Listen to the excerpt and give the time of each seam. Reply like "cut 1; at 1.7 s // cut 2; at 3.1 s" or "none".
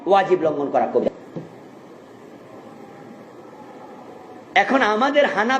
cut 1; at 1.0 s